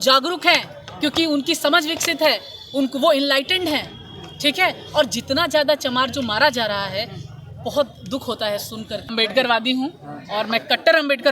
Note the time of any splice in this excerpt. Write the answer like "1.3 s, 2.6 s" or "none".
9.1 s